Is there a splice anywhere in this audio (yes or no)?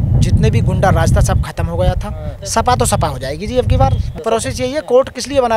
yes